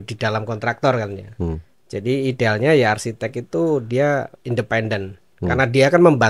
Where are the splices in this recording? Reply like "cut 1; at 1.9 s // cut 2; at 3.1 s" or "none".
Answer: none